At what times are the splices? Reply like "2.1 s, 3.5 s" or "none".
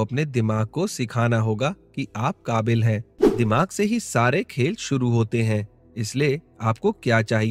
3.2 s